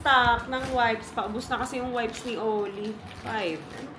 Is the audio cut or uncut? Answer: uncut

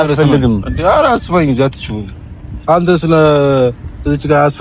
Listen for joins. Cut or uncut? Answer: uncut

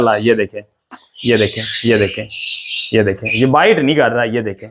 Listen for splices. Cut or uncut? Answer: uncut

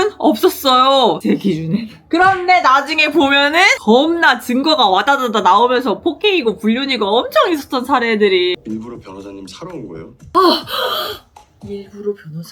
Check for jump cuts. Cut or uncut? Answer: cut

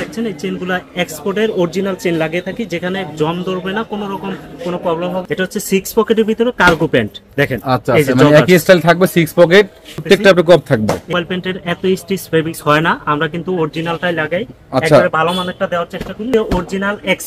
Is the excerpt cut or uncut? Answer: cut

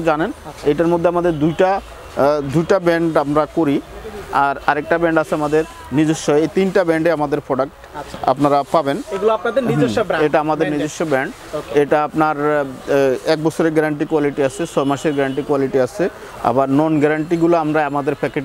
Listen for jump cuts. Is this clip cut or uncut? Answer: uncut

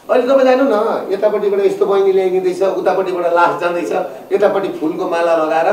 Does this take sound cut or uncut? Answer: uncut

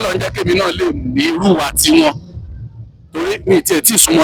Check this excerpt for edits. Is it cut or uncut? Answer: uncut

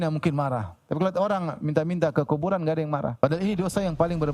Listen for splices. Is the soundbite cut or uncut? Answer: cut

